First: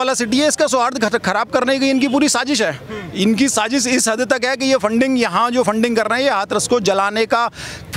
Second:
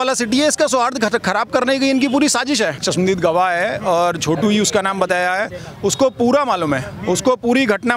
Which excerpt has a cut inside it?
second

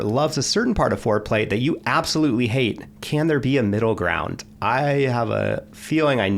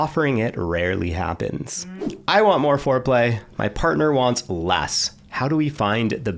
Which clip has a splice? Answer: second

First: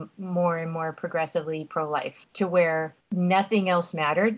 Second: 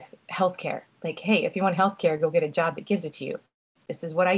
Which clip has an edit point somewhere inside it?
first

